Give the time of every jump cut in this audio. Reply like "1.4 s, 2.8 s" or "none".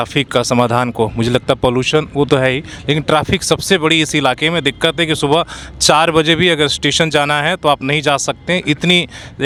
none